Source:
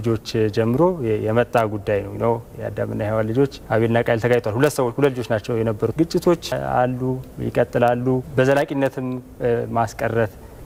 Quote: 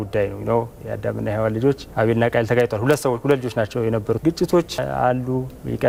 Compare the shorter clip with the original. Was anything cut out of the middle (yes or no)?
no